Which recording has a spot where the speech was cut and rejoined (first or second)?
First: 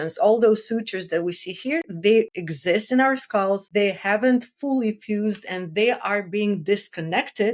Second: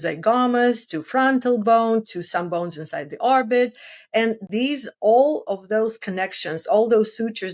first